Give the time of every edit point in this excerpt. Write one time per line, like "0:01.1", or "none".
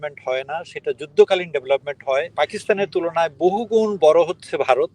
0:02.3